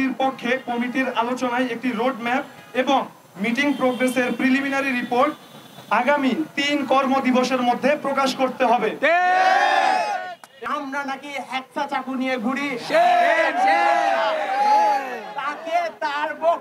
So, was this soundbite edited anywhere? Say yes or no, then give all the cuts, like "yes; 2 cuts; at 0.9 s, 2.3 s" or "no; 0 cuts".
yes; 1 cut; at 10.7 s